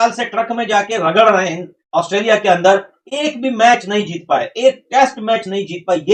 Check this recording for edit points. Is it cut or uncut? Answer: uncut